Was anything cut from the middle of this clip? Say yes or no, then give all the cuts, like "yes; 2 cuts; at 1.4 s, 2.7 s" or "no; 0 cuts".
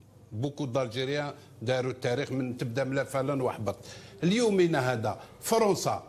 yes; 1 cut; at 2.3 s